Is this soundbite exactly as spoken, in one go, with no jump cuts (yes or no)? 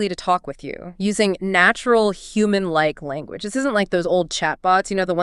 yes